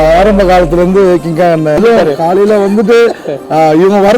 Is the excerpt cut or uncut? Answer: cut